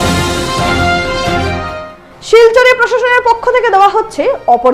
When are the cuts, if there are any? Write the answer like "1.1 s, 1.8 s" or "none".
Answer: 1.4 s